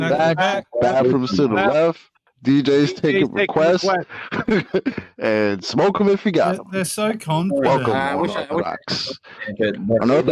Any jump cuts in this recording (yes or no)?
no